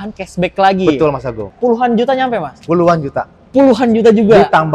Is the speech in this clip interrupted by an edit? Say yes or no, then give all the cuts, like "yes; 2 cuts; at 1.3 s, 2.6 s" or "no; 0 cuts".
yes; 1 cut; at 1.4 s